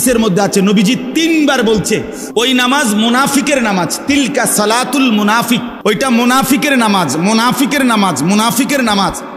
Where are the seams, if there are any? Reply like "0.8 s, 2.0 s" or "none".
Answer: 2.4 s, 5.7 s